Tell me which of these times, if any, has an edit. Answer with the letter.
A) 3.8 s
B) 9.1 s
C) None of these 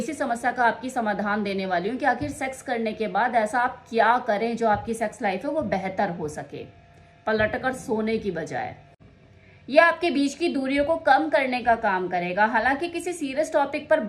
B